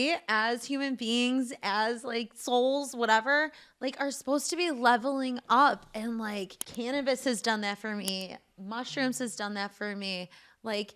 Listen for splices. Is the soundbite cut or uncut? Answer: uncut